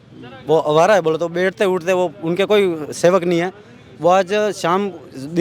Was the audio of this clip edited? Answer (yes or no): no